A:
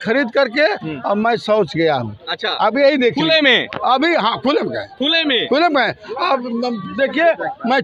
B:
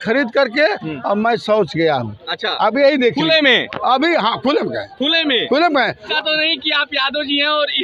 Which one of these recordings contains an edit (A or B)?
B